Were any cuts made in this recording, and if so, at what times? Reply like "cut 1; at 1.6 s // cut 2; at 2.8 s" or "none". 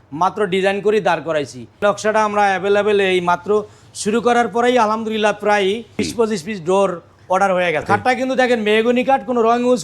cut 1; at 1.6 s // cut 2; at 5.9 s // cut 3; at 7.9 s